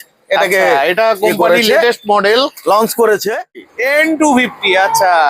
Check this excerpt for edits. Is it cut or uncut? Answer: cut